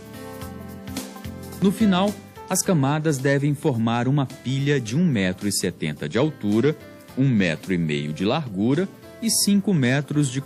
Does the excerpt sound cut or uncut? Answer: uncut